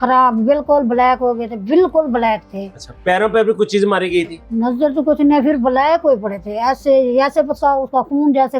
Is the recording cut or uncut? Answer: uncut